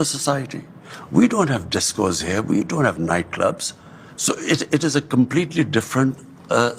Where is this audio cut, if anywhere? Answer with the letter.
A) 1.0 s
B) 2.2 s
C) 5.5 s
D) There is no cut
D